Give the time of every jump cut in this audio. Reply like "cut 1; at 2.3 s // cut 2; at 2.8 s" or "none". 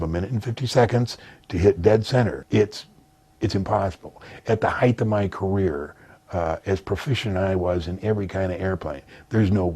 cut 1; at 2.4 s